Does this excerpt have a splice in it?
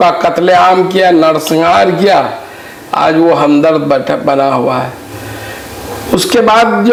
no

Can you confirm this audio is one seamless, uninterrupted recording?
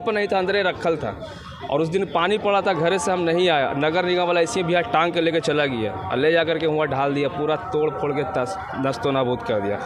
yes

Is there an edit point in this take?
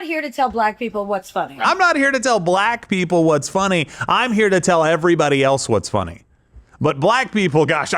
yes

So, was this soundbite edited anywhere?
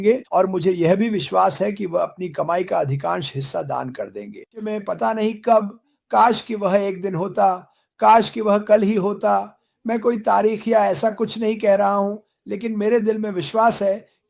yes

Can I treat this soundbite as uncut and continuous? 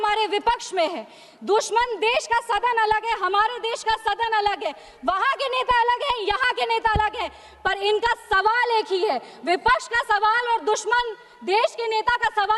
yes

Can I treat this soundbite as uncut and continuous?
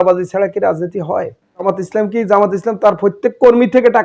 no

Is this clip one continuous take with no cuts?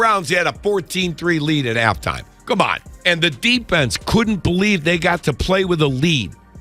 no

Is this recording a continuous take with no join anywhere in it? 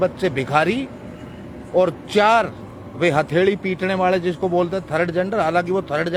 yes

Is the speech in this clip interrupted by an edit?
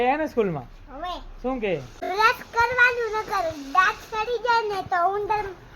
yes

